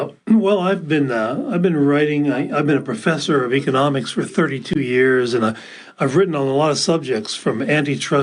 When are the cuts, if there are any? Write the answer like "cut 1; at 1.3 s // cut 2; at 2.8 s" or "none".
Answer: cut 1; at 4.1 s